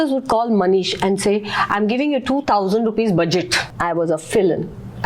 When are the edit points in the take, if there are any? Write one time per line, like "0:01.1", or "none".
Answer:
0:03.7